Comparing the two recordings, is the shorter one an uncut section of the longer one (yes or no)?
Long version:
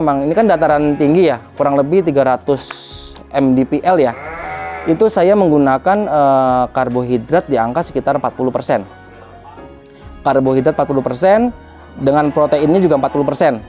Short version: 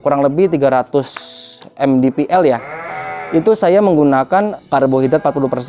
no